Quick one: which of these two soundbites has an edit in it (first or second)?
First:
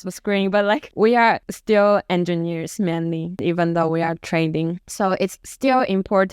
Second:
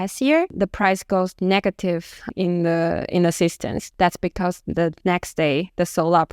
first